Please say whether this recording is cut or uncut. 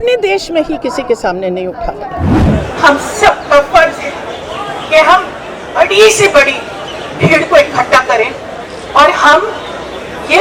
cut